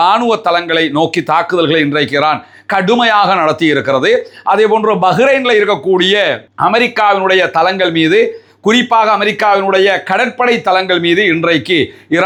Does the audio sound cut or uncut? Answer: uncut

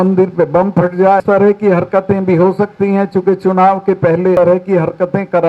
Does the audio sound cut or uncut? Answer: cut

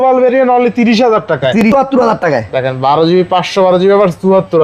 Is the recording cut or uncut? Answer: cut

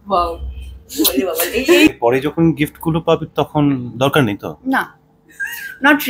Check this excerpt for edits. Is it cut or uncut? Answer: cut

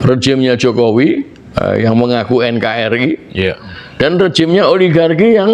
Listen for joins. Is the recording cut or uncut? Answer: cut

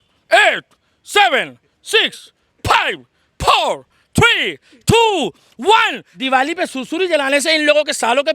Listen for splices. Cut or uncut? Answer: cut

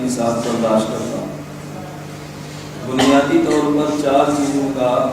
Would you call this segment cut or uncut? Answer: uncut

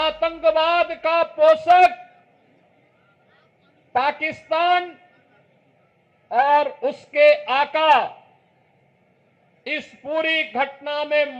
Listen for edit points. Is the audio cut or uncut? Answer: uncut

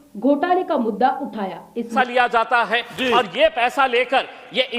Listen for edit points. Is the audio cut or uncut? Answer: cut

